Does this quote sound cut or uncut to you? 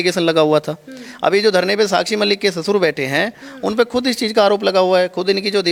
uncut